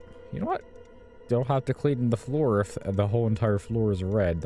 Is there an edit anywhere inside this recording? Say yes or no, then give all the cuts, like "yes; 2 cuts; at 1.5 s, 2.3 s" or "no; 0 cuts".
no; 0 cuts